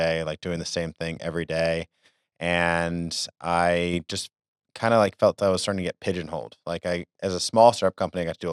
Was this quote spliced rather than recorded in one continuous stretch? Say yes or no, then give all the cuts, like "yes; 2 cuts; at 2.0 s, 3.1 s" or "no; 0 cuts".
no; 0 cuts